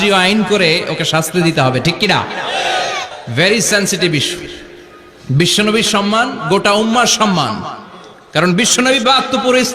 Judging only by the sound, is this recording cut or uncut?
cut